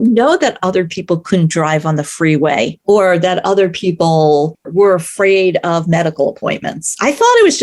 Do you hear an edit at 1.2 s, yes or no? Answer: no